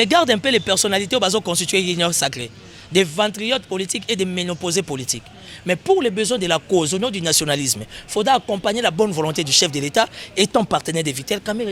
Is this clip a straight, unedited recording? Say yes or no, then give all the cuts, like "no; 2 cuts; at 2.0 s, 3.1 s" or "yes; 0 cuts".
yes; 0 cuts